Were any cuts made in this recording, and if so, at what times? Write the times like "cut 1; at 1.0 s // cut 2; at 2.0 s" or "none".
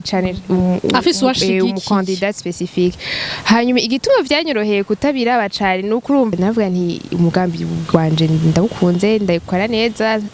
cut 1; at 6.3 s